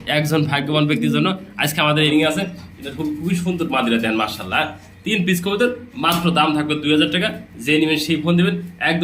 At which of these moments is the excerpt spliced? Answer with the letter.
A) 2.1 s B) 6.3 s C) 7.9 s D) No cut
A